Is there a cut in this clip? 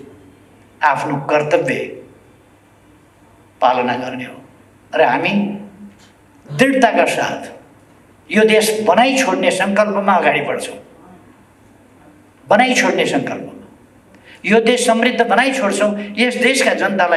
no; 0 cuts

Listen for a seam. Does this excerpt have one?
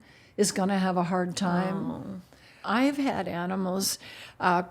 yes; 1 cut; at 2.6 s

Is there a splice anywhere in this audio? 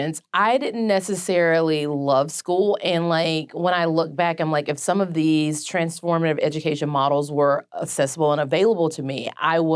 no; 0 cuts

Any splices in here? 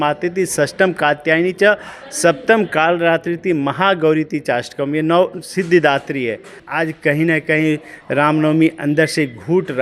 yes; 1 cut; at 6.6 s

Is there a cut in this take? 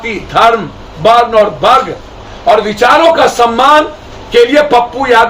no; 0 cuts

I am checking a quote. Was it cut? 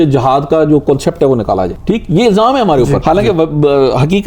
yes; 2 cuts; at 1.8 s, 3.0 s

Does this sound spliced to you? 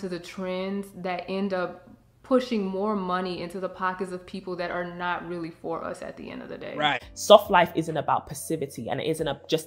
yes; 1 cut; at 7.1 s

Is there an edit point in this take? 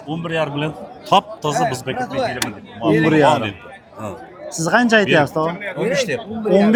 no; 0 cuts

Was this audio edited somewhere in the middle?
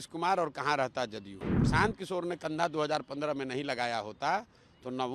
yes; 1 cut; at 1.6 s

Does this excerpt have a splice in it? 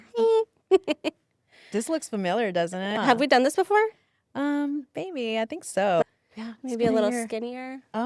yes; 2 cuts; at 2.9 s, 6.0 s

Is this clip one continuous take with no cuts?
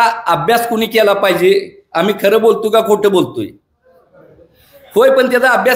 yes; 0 cuts

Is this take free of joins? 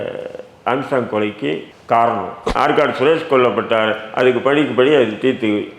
no; 1 cut; at 2.5 s

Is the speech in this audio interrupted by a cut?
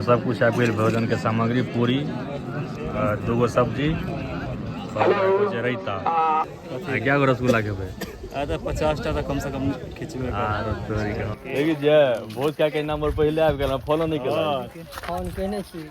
yes; 2 cuts; at 6.4 s, 11.4 s

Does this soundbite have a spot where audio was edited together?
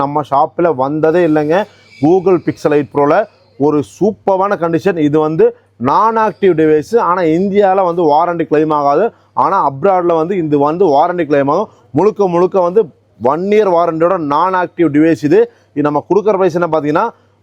no; 0 cuts

